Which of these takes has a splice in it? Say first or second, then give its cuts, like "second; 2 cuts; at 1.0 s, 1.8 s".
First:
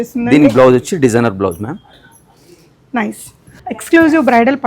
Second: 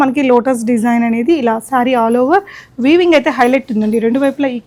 first; 2 cuts; at 1.9 s, 3.6 s